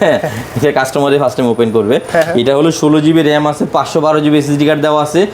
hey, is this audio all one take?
yes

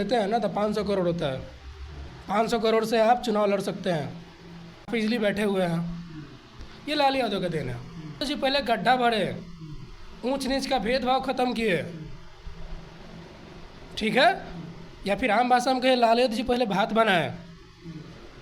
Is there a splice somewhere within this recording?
yes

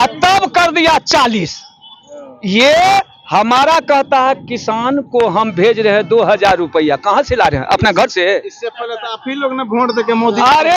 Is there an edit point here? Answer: no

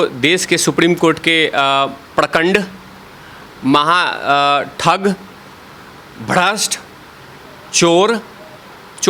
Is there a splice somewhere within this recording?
no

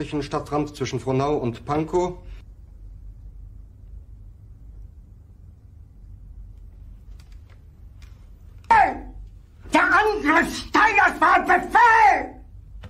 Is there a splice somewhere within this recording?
no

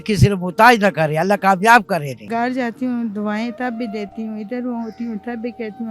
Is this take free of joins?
no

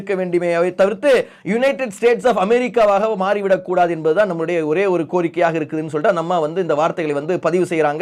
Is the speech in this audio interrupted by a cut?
no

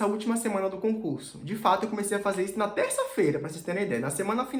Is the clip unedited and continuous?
yes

